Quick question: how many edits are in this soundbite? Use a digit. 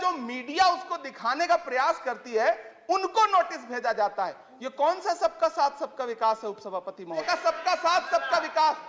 1